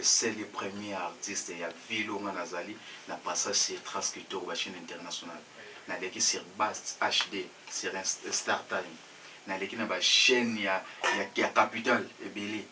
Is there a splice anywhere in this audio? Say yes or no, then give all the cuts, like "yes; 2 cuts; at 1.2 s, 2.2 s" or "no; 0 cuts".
no; 0 cuts